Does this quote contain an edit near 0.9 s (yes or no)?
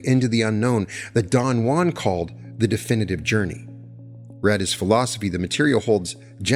no